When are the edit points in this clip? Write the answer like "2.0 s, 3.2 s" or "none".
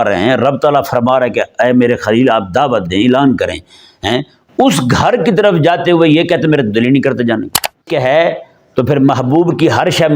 7.9 s